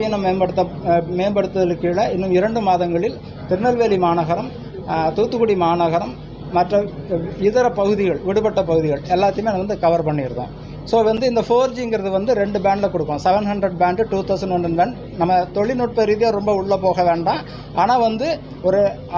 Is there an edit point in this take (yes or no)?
no